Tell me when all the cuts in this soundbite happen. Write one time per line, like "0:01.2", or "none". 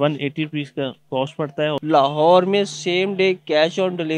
0:01.8